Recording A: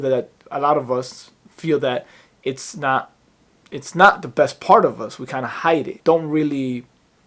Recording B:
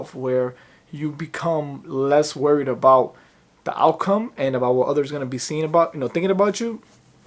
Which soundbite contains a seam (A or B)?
A